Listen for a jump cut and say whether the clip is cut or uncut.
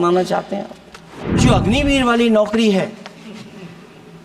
cut